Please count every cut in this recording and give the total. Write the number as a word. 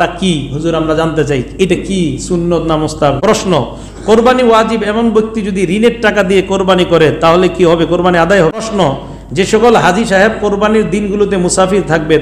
two